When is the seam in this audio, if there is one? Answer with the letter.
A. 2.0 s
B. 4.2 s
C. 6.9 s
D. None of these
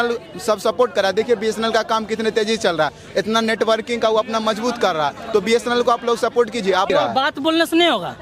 C